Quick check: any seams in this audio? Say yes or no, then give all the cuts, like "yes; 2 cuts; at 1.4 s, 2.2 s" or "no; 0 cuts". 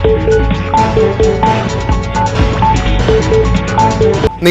yes; 1 cut; at 1.0 s